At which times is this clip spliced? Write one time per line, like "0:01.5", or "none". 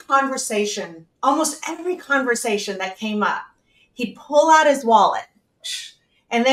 none